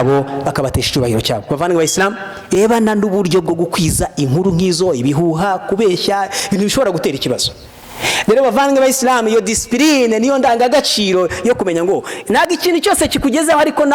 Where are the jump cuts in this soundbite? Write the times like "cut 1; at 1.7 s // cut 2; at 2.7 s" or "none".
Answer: cut 1; at 2.5 s